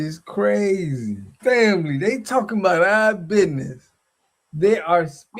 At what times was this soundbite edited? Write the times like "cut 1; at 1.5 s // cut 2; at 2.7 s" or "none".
cut 1; at 1.3 s

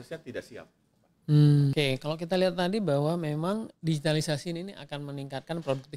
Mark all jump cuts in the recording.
cut 1; at 1.7 s

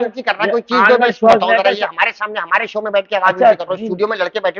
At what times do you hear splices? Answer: none

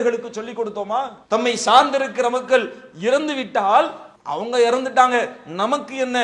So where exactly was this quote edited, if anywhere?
none

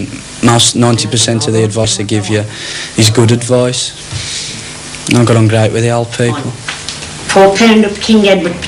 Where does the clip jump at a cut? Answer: none

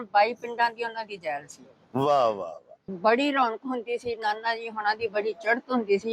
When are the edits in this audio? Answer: cut 1; at 2.9 s

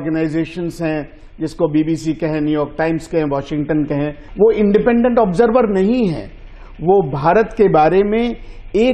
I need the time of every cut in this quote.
cut 1; at 4.2 s

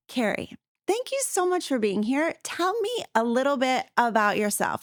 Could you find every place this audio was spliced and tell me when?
none

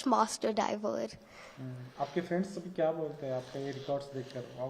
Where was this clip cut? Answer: none

